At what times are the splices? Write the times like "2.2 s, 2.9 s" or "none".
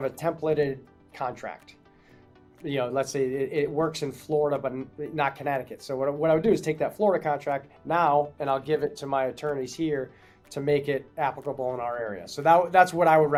none

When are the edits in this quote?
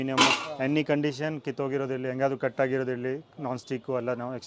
none

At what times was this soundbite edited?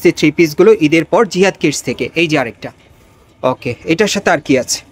none

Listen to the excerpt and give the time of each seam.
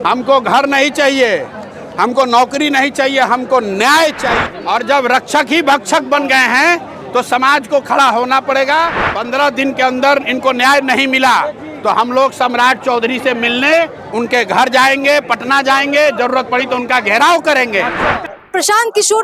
4.4 s, 9.0 s, 18.2 s

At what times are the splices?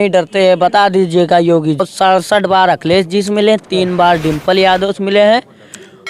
1.8 s

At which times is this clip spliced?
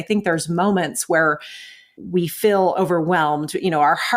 2.0 s

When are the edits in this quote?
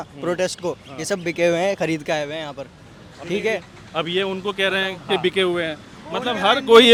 none

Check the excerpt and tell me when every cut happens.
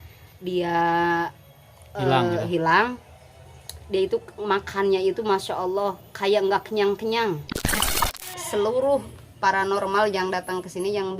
7.9 s

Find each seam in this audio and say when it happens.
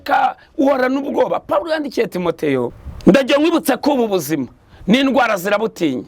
2.8 s

